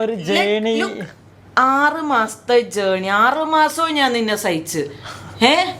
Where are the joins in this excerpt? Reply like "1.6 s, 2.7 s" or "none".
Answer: none